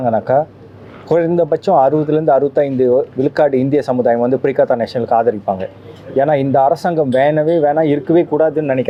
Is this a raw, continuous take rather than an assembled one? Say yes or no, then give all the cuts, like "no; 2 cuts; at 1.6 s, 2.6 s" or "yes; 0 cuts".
yes; 0 cuts